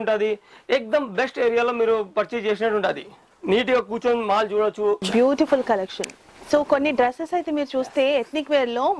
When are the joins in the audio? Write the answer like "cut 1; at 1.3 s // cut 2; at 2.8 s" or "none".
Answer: cut 1; at 5.1 s